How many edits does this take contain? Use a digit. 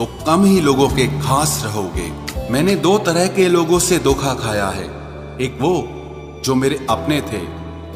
1